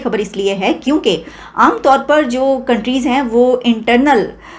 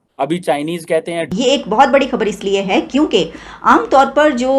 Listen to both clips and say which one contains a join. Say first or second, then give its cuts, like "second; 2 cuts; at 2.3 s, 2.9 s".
second; 1 cut; at 1.0 s